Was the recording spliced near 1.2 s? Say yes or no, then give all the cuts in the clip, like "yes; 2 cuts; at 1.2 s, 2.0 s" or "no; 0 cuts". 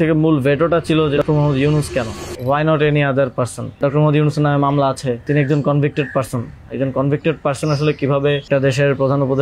yes; 5 cuts; at 1.2 s, 2.3 s, 3.8 s, 5.2 s, 8.5 s